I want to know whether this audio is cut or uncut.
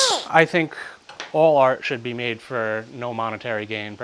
uncut